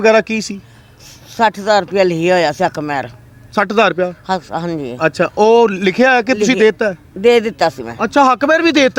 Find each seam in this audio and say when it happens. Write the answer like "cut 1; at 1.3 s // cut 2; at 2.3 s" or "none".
none